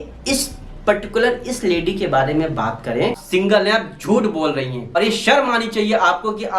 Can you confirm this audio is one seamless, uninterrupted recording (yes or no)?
no